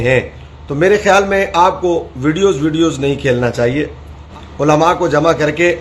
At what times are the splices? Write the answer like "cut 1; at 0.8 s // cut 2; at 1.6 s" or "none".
cut 1; at 4.2 s